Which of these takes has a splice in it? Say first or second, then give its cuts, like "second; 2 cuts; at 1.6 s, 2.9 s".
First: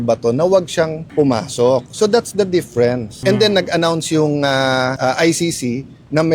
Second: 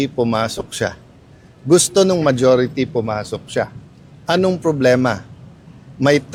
first; 3 cuts; at 1.0 s, 3.1 s, 5.0 s